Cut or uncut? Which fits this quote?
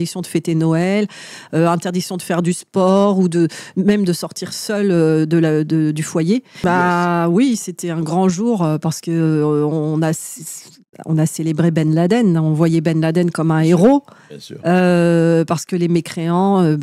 cut